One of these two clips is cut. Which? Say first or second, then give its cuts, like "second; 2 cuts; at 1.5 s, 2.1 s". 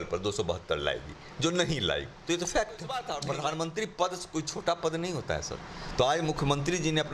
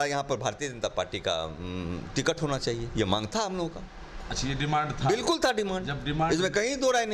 first; 1 cut; at 3.1 s